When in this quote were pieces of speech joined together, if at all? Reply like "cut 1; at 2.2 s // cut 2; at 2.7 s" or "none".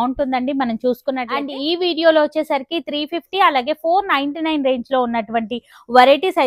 cut 1; at 1.5 s